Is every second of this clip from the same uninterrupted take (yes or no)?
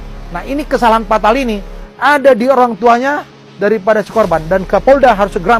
yes